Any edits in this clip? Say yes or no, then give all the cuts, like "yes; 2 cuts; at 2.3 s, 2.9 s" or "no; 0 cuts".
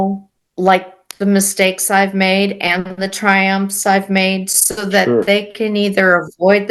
no; 0 cuts